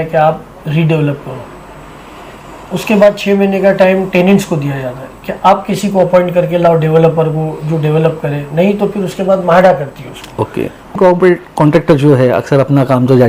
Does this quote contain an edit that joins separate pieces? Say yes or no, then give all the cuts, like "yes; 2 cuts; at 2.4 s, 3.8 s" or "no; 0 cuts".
yes; 1 cut; at 11.0 s